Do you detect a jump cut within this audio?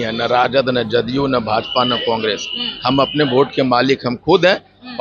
no; 0 cuts

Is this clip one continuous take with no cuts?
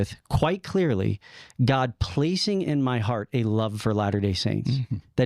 yes; 0 cuts

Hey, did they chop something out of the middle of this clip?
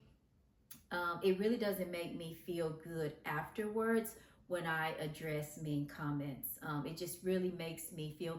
no; 0 cuts

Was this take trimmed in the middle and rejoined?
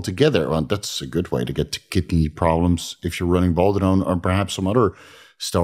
no; 0 cuts

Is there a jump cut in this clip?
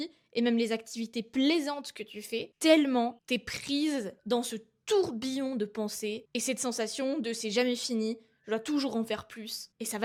no; 0 cuts

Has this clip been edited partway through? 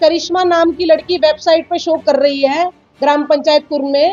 no; 0 cuts

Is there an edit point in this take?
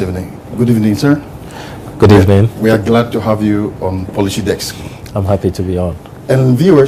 no; 0 cuts

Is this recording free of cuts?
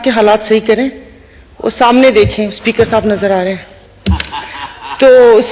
yes; 0 cuts

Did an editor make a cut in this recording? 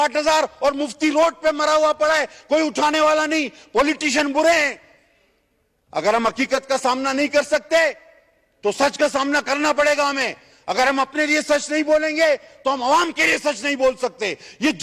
no; 0 cuts

